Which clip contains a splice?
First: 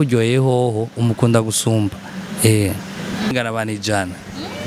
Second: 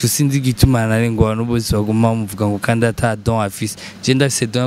first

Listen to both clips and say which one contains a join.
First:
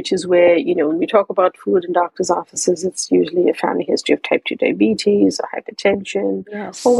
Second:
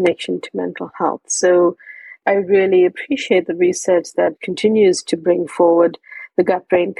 second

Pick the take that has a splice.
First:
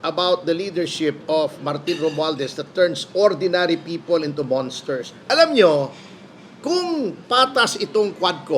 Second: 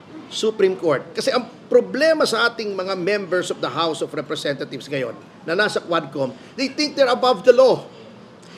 first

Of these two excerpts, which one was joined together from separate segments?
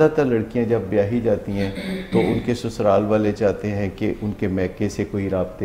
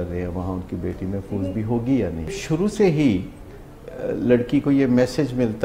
second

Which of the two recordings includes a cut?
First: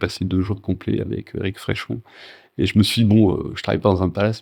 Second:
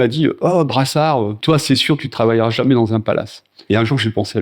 second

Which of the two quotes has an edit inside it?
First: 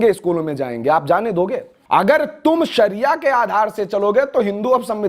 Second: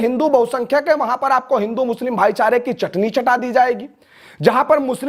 first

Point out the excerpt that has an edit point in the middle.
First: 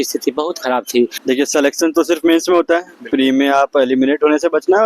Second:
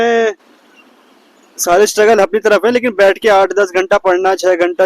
first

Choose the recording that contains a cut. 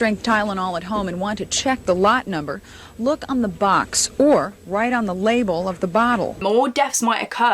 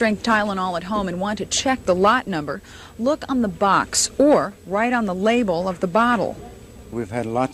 first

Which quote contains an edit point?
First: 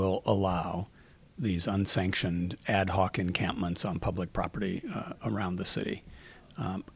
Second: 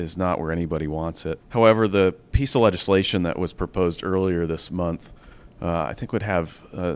second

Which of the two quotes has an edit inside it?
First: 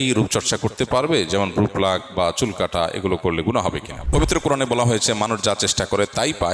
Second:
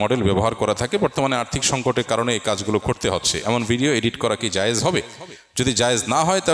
first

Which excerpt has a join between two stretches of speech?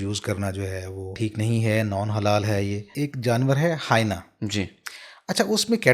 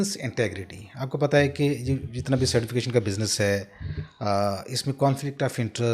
first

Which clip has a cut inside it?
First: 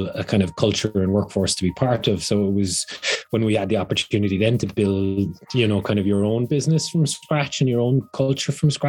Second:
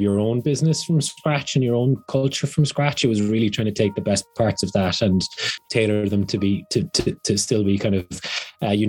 second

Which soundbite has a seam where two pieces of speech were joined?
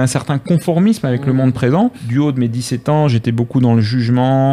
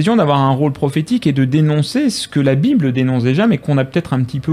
first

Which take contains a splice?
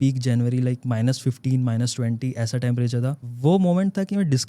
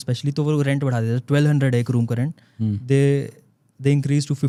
first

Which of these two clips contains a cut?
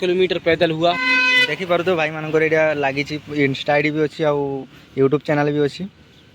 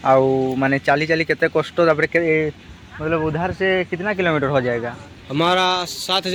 first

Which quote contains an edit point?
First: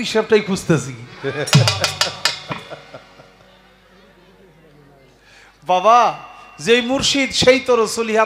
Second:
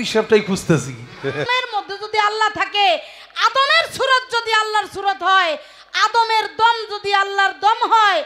second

